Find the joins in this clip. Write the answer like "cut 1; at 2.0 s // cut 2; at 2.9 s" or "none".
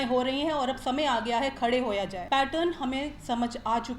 cut 1; at 2.2 s

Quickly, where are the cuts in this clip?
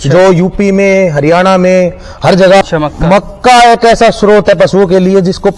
cut 1; at 2.6 s

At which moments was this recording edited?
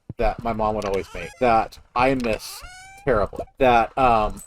cut 1; at 1.2 s // cut 2; at 3.4 s

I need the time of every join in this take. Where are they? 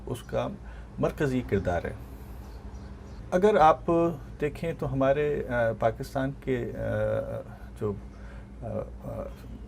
none

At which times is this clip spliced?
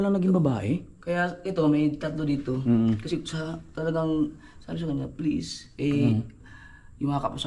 none

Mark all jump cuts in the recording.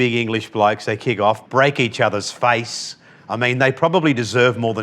cut 1; at 1.4 s

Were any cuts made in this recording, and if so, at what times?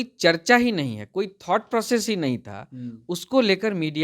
none

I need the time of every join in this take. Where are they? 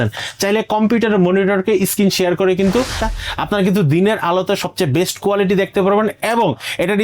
cut 1; at 3.0 s

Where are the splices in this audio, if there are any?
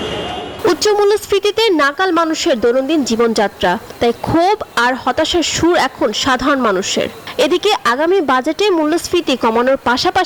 none

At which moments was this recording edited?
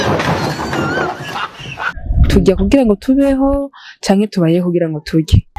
cut 1; at 2.0 s

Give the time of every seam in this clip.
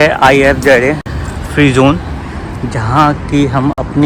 none

